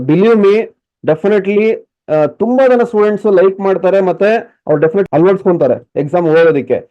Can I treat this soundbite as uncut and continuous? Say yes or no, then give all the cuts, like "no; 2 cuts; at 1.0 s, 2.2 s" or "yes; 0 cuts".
yes; 0 cuts